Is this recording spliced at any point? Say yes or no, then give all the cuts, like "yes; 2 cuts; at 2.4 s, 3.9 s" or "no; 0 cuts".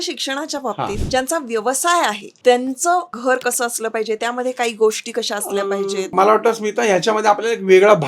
yes; 4 cuts; at 1.0 s, 2.3 s, 3.1 s, 6.1 s